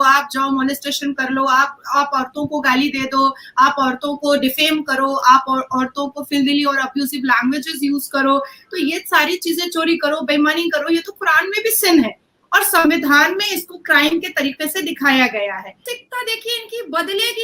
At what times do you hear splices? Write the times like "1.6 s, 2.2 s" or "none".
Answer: 15.9 s